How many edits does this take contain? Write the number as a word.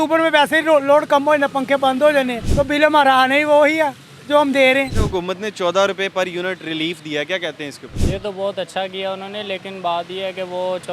three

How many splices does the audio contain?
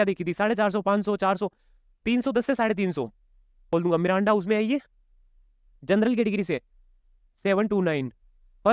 one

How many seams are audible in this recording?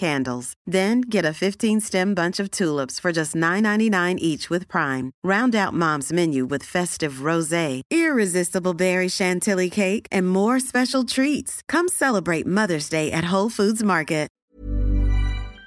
one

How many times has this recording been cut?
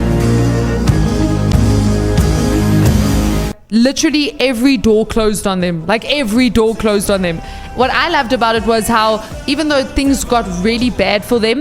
three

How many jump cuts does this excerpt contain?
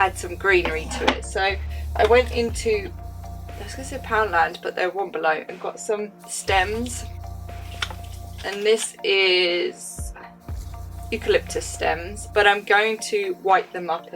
zero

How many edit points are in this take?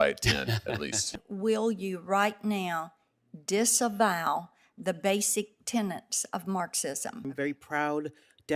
two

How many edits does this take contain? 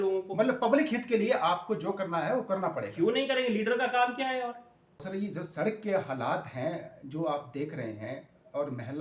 one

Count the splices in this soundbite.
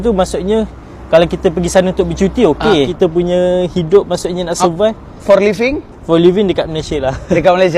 one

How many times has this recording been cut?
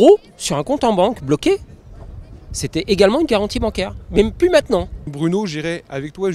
one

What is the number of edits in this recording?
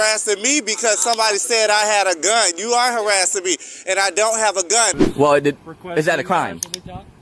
one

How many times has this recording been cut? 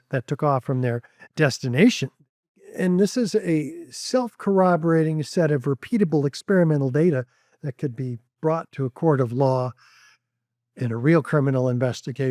one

